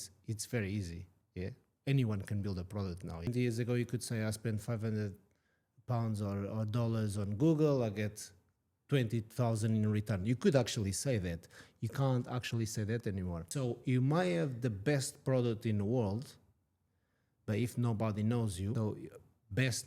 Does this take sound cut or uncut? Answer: cut